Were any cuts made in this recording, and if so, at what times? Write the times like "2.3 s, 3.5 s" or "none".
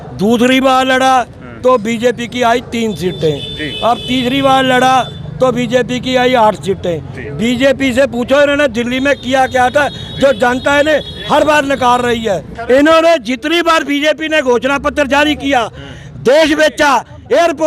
12.5 s